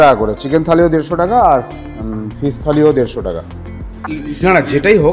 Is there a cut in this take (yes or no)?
yes